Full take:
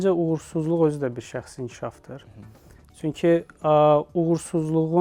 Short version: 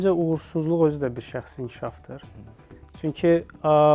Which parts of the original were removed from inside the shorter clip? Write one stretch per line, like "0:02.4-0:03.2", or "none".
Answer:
none